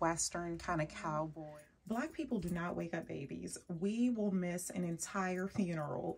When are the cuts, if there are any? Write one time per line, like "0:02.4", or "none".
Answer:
0:01.4